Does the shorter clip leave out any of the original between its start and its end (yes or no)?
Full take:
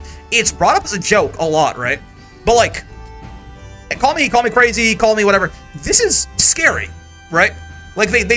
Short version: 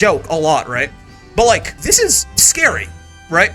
yes